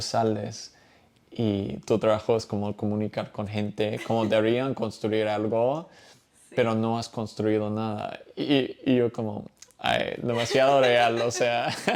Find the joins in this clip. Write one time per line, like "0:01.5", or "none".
none